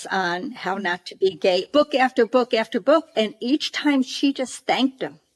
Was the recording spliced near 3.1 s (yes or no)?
no